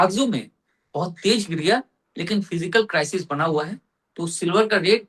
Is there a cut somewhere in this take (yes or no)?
no